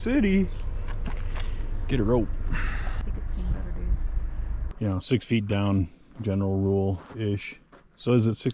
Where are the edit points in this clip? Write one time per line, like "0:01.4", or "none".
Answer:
0:03.0
0:04.7